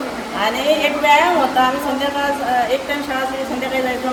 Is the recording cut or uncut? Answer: uncut